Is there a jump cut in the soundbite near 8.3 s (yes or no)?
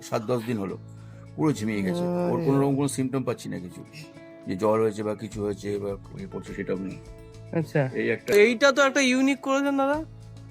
yes